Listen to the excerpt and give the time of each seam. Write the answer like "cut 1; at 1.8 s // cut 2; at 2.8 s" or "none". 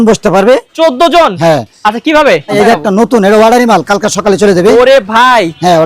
cut 1; at 2.5 s